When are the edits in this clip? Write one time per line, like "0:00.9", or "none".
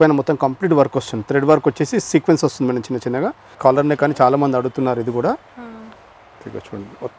0:03.5

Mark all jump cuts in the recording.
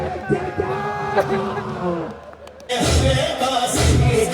0:02.7

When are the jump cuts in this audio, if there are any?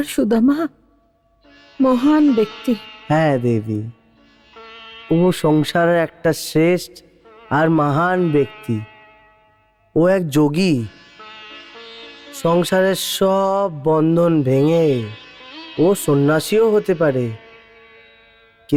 none

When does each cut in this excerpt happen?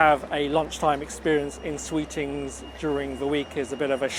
none

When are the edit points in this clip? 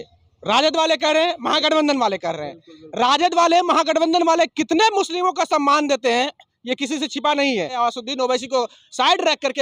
0:07.7

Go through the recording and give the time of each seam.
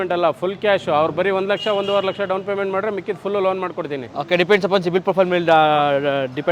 none

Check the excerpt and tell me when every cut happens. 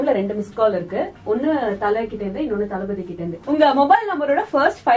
0:03.3

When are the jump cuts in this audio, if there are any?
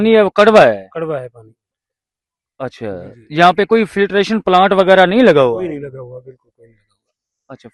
none

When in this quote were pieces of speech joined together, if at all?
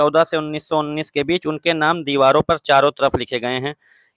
none

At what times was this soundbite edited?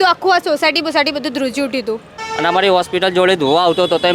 0:02.2

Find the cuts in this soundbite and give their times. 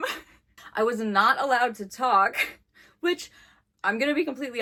none

